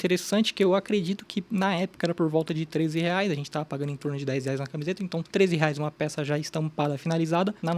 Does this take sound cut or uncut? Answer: cut